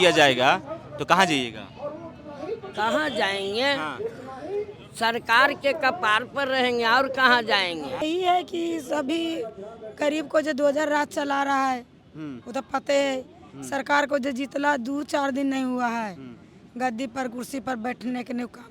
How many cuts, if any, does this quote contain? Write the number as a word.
one